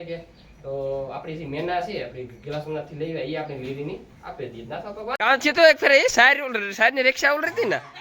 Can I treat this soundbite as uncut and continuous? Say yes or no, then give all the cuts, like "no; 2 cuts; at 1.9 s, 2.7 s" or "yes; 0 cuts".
no; 1 cut; at 5.2 s